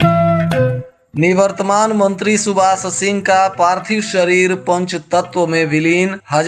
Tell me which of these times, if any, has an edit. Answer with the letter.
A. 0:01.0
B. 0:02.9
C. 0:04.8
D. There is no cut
A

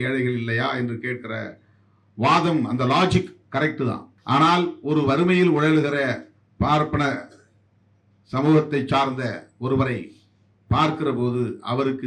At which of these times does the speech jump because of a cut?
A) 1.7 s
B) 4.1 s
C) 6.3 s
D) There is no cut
B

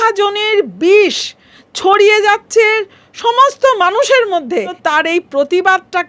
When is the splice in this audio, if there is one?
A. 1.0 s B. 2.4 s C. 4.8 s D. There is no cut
C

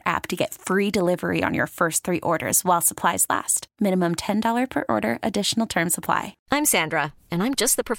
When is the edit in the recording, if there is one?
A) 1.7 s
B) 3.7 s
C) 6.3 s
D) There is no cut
C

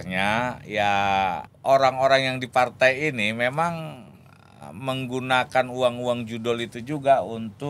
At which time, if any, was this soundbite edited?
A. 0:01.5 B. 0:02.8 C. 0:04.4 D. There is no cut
A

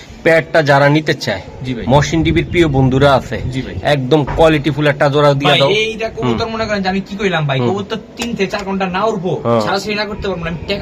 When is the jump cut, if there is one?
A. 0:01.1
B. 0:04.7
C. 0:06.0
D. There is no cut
D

